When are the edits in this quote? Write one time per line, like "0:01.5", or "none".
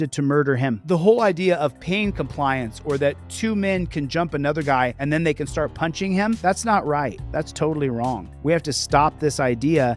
none